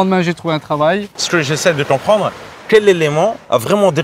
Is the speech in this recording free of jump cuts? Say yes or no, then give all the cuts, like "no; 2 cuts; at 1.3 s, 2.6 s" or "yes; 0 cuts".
yes; 0 cuts